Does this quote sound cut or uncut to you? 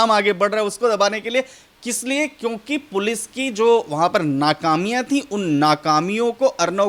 uncut